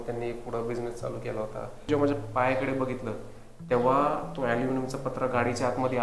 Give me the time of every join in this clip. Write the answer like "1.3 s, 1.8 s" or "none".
1.9 s